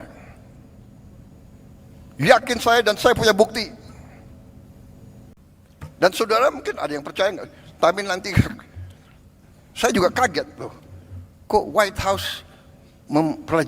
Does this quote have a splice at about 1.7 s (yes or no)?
no